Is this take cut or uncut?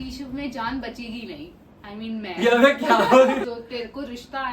cut